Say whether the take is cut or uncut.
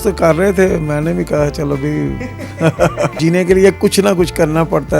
cut